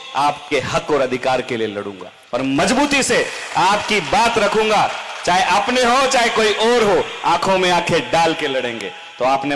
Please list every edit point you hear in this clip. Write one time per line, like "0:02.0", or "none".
none